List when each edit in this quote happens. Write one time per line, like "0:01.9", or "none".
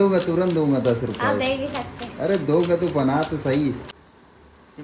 0:03.9